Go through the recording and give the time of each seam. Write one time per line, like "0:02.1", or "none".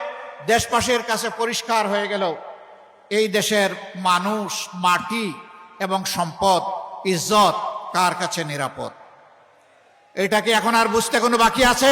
none